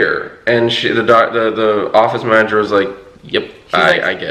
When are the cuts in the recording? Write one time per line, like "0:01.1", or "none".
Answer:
none